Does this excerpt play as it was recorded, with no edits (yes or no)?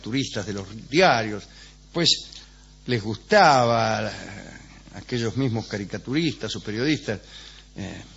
no